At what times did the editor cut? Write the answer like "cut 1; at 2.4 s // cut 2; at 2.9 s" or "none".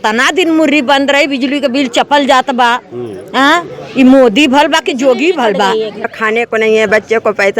cut 1; at 6.1 s